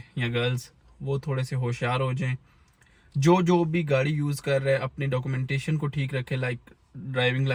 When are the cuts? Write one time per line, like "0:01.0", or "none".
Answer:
none